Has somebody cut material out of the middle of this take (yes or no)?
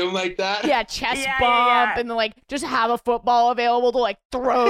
no